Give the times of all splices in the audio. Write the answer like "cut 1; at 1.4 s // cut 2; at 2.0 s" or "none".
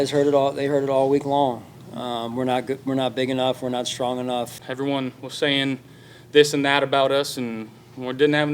cut 1; at 4.6 s

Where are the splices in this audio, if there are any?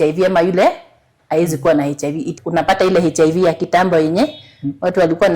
cut 1; at 2.3 s

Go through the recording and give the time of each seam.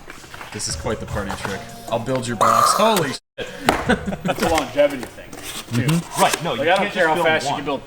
cut 1; at 4.4 s

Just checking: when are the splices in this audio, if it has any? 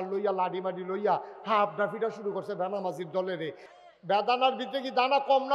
cut 1; at 3.7 s

